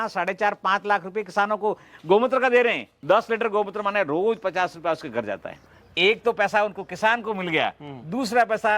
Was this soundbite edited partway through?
yes; 2 cuts; at 2.9 s, 5.7 s

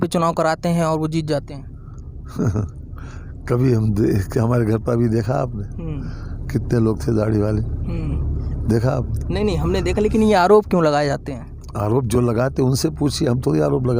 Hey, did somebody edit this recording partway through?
no; 0 cuts

